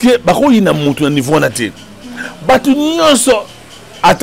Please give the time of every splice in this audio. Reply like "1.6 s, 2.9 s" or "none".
none